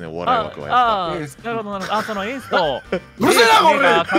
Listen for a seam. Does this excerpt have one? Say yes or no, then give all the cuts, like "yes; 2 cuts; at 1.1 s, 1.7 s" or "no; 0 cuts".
no; 0 cuts